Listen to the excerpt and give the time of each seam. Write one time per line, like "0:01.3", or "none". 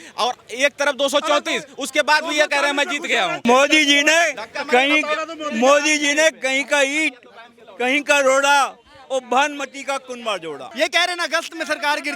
0:03.4
0:10.7

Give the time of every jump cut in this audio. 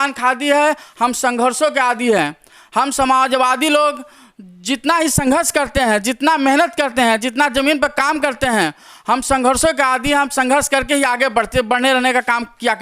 none

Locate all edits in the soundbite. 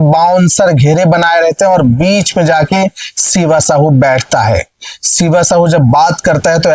none

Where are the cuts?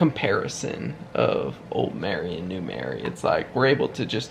none

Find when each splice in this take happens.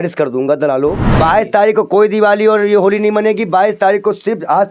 0:01.1

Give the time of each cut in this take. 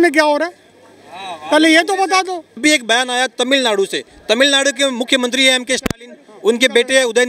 0:02.5

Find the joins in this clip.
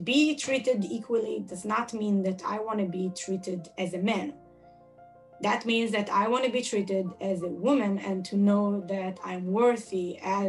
none

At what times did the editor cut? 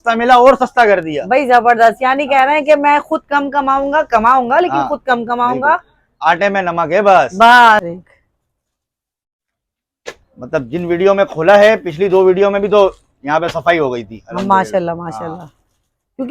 0:07.8

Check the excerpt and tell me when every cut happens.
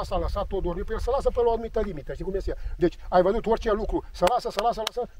none

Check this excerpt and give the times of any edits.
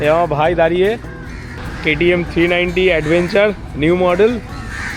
0:01.1

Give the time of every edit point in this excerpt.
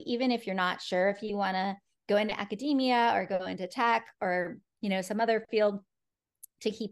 none

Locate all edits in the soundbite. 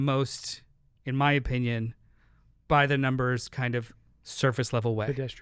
none

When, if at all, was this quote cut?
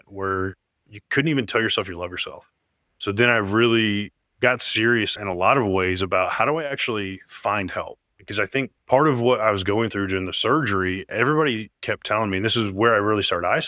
none

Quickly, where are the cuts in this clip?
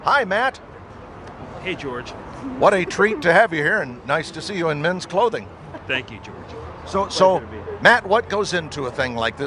0:08.2

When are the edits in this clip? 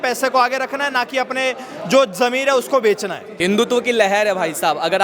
0:03.3

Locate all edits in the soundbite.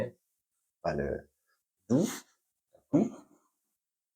0:02.9

